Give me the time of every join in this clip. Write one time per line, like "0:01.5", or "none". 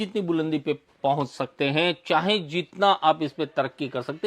none